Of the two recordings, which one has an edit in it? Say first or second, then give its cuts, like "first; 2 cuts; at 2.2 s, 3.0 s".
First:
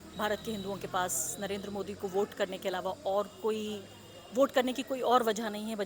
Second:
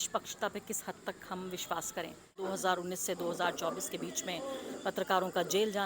second; 1 cut; at 2.4 s